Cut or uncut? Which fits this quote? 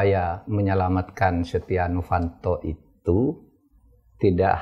uncut